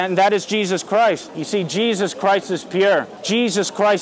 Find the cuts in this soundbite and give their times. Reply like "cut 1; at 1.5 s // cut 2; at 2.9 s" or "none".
cut 1; at 1.3 s // cut 2; at 3.2 s